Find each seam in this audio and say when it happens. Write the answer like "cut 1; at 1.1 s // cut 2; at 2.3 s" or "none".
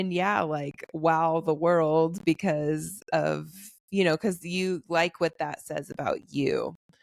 none